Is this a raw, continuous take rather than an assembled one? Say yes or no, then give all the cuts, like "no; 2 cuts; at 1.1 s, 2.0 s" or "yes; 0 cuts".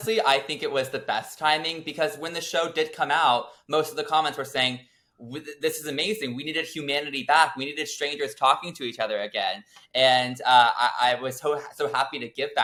yes; 0 cuts